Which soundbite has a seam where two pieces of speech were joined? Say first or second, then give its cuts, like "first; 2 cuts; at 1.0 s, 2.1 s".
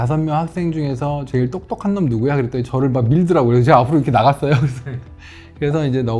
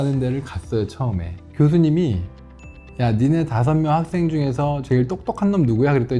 second; 1 cut; at 1.4 s